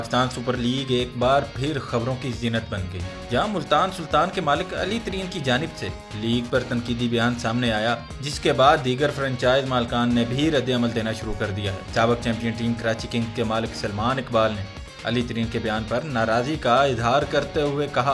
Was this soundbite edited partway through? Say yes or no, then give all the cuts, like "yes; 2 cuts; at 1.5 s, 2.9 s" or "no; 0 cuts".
no; 0 cuts